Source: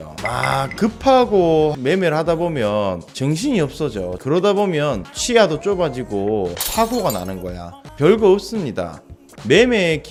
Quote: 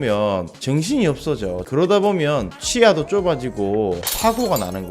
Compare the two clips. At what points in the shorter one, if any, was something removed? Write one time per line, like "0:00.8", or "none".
none